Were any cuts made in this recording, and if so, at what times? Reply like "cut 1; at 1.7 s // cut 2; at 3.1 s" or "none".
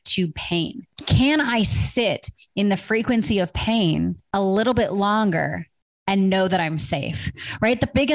cut 1; at 1.0 s // cut 2; at 4.2 s